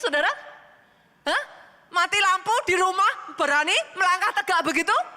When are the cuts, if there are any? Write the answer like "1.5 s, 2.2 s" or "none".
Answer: 3.5 s